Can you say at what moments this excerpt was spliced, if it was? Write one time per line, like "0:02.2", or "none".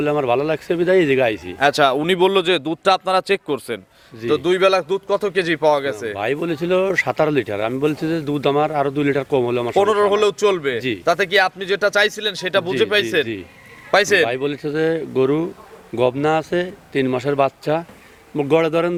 none